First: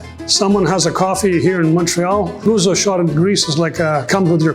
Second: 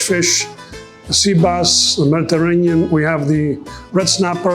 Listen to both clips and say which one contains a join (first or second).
first